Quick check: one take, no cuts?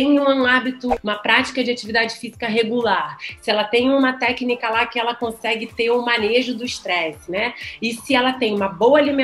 no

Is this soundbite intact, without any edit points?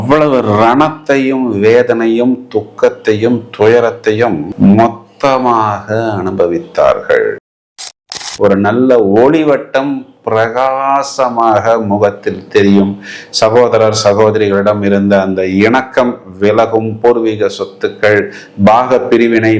no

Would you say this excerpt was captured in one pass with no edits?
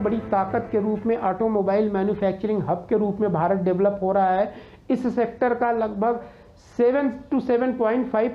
yes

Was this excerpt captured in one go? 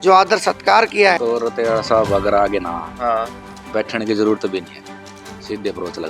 no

